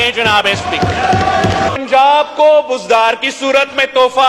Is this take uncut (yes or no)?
yes